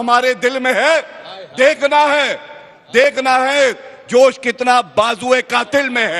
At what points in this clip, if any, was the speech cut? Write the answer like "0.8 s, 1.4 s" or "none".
none